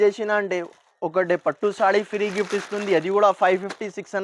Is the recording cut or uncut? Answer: uncut